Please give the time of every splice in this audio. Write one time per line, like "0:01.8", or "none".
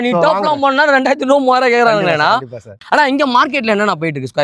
0:02.7